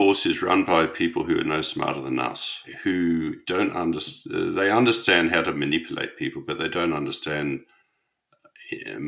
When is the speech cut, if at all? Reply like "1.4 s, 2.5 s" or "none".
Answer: 2.6 s